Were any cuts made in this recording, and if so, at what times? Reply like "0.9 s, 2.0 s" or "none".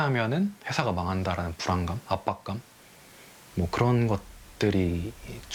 none